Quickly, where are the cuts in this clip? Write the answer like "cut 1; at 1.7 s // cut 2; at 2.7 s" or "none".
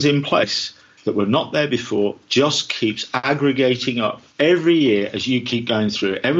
cut 1; at 3.1 s // cut 2; at 4.2 s

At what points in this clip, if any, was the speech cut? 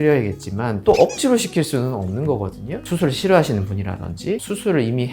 cut 1; at 2.8 s

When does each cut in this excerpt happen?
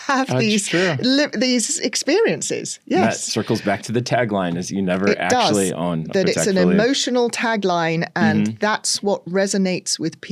none

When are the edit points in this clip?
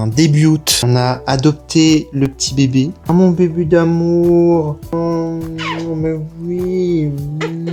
none

